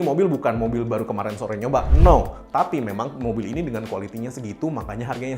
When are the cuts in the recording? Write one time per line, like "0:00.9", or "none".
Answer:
none